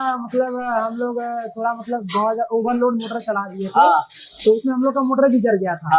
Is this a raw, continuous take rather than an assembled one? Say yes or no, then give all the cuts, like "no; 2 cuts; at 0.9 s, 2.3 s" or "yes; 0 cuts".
yes; 0 cuts